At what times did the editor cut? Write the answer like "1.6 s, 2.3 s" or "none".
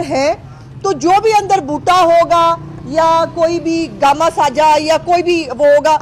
none